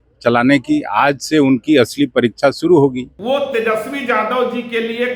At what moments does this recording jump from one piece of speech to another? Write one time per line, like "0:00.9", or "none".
0:03.1